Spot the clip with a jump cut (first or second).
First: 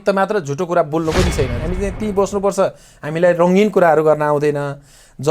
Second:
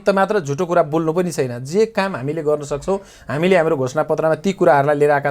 first